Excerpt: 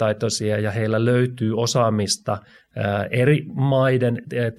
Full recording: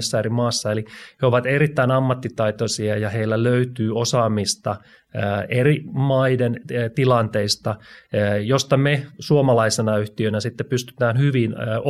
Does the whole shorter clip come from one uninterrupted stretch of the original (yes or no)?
yes